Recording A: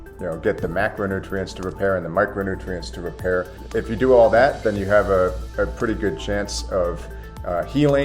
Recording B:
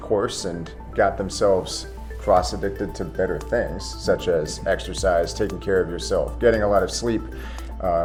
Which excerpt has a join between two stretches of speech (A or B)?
A